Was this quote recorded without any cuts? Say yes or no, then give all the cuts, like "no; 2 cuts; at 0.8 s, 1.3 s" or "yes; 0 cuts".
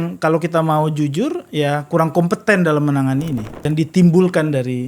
no; 1 cut; at 3.6 s